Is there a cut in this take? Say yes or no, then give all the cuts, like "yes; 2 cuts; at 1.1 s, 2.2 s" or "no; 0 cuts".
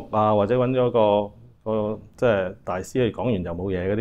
no; 0 cuts